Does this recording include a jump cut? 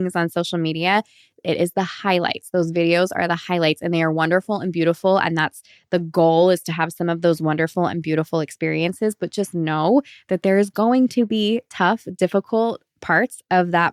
no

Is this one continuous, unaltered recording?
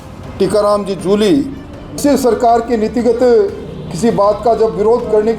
no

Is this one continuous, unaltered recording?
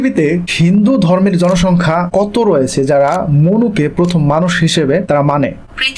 yes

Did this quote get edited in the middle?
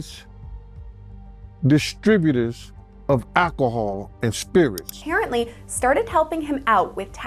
yes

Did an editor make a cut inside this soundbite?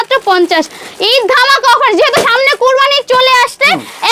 no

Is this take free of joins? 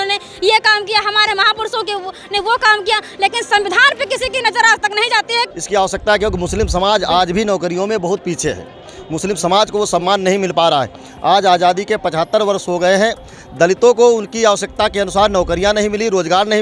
no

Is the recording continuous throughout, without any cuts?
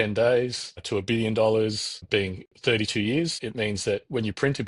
no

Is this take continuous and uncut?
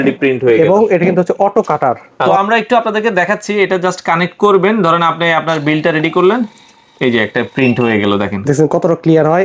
no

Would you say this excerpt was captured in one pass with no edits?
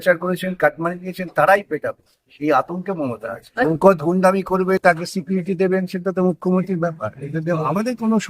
no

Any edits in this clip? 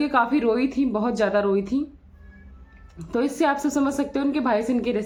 no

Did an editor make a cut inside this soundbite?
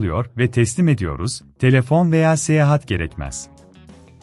yes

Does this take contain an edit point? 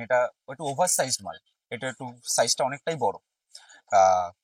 no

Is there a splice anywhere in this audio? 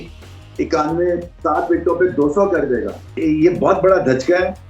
yes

